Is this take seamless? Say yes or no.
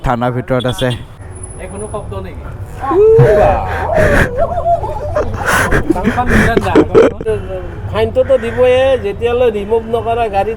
no